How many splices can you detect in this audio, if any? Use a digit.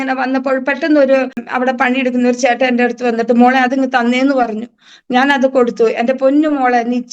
1